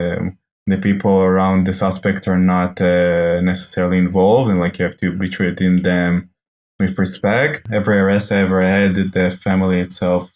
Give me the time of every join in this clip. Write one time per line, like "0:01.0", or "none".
0:07.6